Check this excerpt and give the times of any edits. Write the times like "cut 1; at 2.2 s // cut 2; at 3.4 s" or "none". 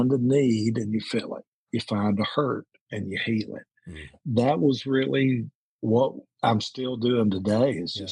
cut 1; at 4.2 s // cut 2; at 6.2 s

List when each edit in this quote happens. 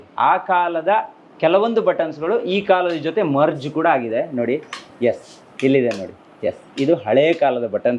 none

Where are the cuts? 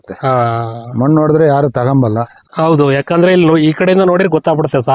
cut 1; at 2.4 s

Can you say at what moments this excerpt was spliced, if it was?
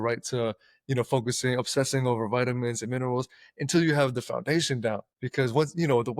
cut 1; at 5.1 s

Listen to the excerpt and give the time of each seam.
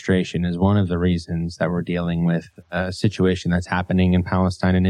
none

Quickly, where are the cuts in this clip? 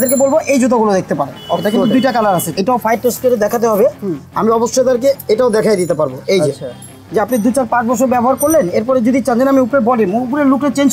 cut 1; at 2.6 s // cut 2; at 7.0 s

